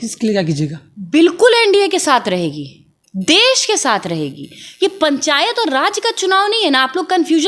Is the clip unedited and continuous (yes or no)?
yes